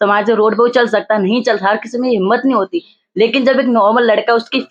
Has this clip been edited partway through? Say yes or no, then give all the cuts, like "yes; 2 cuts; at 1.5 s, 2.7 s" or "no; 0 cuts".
no; 0 cuts